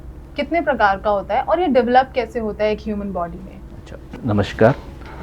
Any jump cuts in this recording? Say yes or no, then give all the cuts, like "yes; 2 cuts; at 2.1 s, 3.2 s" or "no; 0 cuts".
no; 0 cuts